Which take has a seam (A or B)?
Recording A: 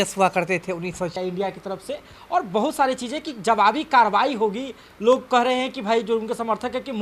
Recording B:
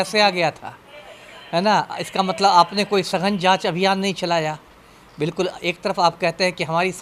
A